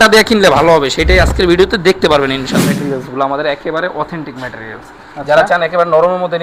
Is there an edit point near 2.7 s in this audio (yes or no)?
yes